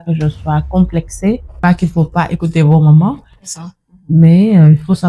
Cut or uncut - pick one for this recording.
cut